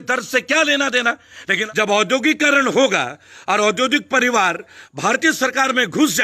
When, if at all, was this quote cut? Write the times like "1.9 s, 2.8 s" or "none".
1.5 s